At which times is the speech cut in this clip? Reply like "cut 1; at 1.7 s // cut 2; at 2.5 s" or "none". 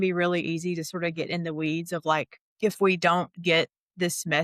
cut 1; at 2.4 s